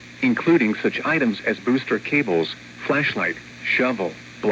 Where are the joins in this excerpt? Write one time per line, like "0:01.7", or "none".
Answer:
0:01.3

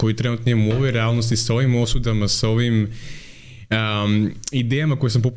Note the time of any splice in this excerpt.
none

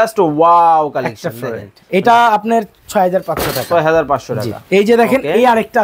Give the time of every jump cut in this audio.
none

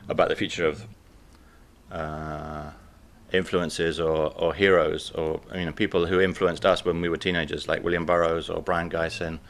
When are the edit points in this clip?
none

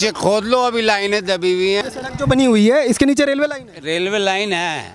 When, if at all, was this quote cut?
0:01.8

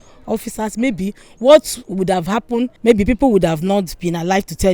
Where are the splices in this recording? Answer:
0:02.7

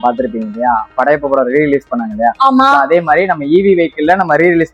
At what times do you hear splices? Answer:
none

